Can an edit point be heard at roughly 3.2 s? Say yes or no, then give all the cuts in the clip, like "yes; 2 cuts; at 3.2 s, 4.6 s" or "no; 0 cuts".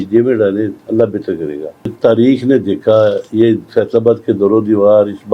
no; 1 cut; at 1.9 s